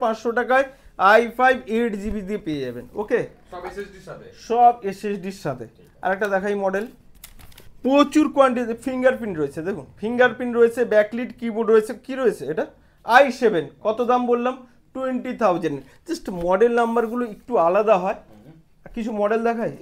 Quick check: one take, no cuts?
yes; 0 cuts

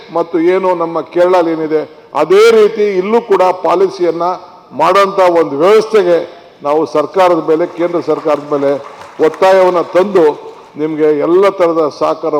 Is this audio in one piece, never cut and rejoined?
yes; 0 cuts

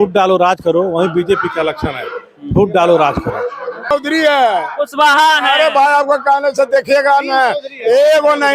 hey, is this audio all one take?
no; 1 cut; at 3.9 s

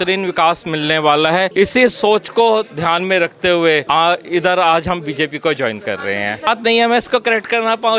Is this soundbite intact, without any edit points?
no; 3 cuts; at 1.5 s, 3.8 s, 6.5 s

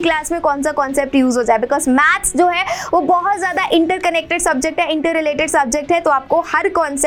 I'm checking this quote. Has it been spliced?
no; 0 cuts

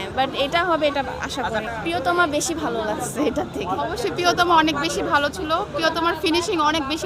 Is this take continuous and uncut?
yes; 0 cuts

